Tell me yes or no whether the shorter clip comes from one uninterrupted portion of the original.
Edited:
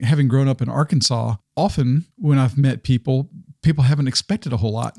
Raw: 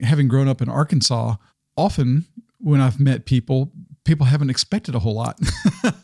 no